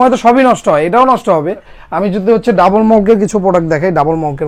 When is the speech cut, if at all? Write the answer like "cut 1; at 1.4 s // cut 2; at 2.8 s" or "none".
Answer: none